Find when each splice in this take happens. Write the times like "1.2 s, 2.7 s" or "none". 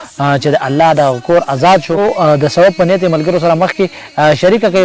2.0 s

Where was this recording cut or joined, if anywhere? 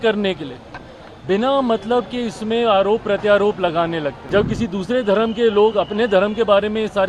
4.2 s

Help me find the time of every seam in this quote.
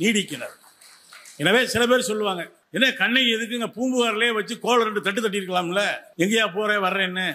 2.6 s, 6.0 s

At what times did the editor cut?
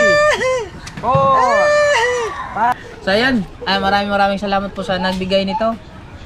2.7 s

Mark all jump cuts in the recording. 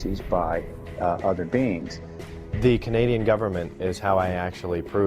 4.0 s

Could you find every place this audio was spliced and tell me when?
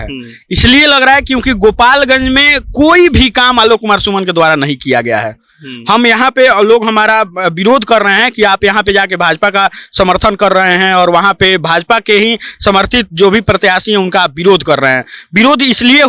none

